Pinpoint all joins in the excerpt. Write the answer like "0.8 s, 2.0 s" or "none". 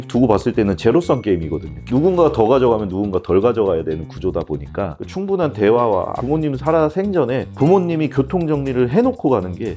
5.0 s